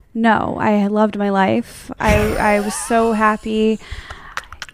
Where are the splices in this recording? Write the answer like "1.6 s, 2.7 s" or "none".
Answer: none